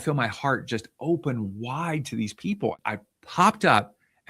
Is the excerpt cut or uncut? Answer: cut